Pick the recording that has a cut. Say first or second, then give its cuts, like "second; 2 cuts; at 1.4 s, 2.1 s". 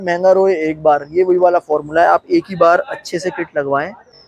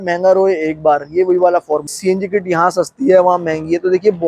second; 1 cut; at 1.9 s